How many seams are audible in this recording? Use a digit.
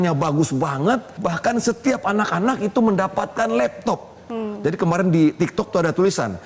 1